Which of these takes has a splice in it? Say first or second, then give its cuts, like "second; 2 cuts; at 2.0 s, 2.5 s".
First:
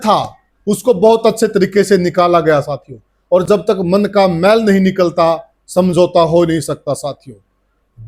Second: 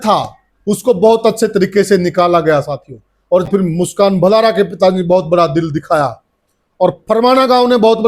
second; 1 cut; at 3.5 s